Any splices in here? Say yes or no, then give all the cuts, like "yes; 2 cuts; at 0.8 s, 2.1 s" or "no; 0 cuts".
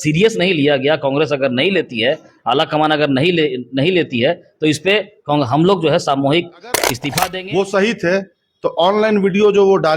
yes; 1 cut; at 7.0 s